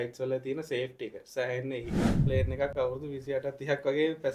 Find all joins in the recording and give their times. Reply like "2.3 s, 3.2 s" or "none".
2.1 s